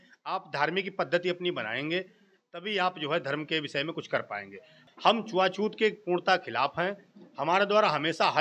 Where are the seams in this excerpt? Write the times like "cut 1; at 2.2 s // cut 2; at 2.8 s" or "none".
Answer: cut 1; at 4.7 s